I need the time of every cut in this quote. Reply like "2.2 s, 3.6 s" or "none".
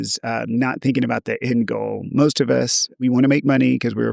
2.9 s